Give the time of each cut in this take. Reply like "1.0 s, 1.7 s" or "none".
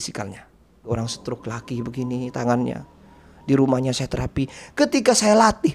0.9 s

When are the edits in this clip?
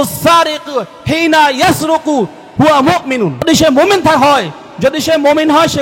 3.4 s

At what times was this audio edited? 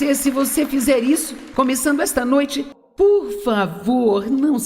2.8 s

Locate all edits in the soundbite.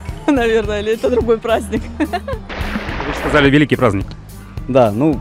2.8 s

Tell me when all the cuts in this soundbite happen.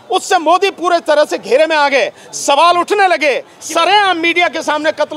3.5 s

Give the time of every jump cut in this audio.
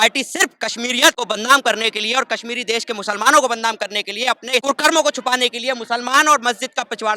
1.2 s, 4.6 s

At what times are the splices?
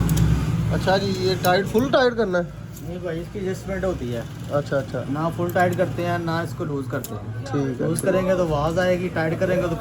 none

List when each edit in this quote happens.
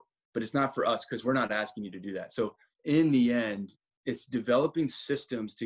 2.7 s, 3.9 s

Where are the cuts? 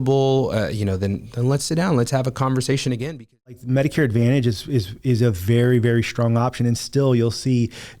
3.6 s

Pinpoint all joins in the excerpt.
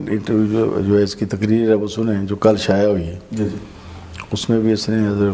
none

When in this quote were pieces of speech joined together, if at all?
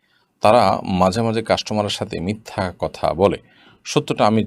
none

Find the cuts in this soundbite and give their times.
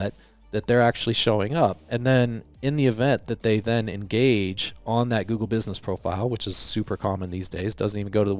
none

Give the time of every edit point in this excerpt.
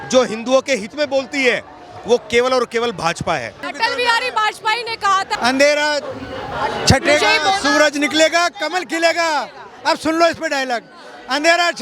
3.6 s, 5.4 s

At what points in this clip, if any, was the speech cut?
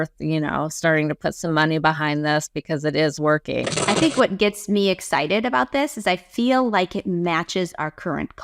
3.7 s

